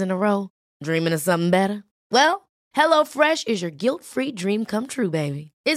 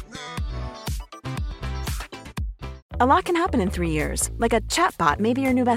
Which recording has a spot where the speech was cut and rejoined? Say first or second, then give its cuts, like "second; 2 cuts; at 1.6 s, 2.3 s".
second; 1 cut; at 2.7 s